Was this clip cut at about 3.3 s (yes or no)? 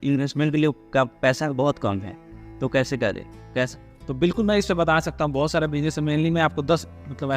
yes